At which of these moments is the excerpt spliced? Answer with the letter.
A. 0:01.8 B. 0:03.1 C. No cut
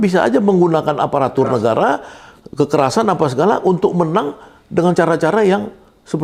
C